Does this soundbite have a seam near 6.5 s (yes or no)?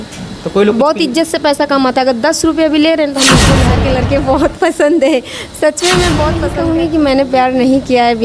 yes